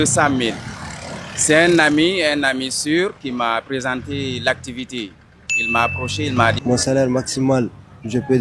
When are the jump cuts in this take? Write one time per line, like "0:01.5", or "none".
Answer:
0:06.6

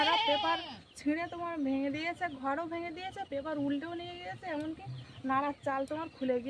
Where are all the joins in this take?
none

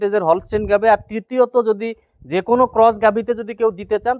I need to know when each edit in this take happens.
none

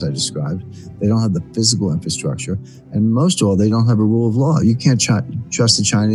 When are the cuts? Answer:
none

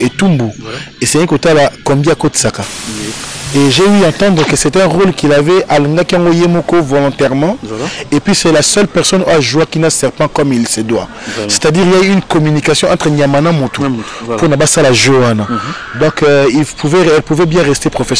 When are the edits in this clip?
0:03.3

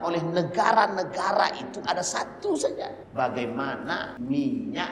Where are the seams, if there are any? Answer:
0:03.0
0:04.1

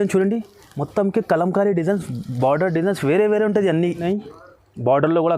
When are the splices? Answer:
0:04.0

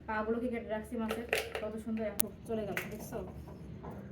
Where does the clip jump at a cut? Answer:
0:02.2

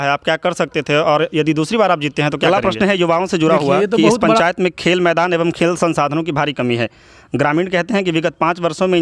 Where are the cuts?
0:02.5

